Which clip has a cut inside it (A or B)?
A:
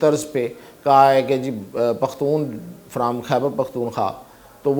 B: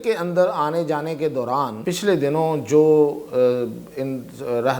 B